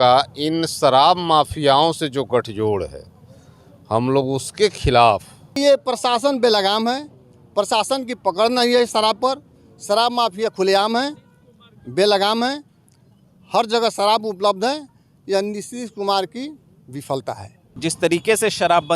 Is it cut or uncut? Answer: cut